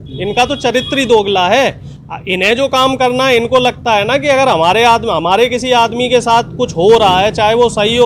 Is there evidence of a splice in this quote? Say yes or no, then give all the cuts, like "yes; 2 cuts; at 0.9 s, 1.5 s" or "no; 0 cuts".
no; 0 cuts